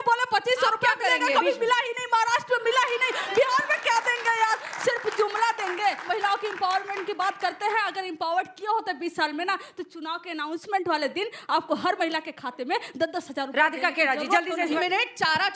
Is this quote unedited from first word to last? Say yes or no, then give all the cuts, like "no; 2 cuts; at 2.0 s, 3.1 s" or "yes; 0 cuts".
no; 2 cuts; at 6.0 s, 14.8 s